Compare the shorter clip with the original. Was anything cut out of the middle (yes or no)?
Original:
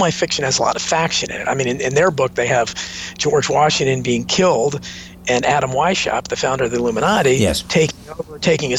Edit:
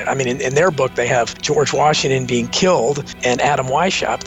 yes